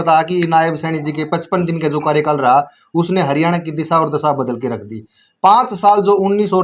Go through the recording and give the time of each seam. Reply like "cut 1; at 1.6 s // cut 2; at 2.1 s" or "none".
none